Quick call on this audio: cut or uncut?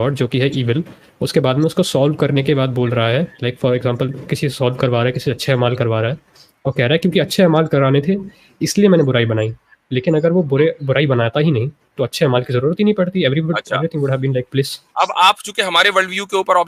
uncut